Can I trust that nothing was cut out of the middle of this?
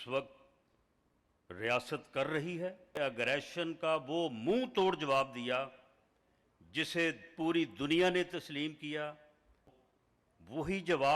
no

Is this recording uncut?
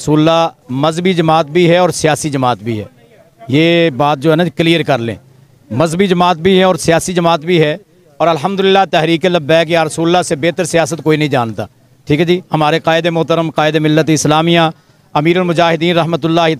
yes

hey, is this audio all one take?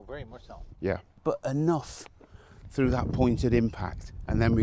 no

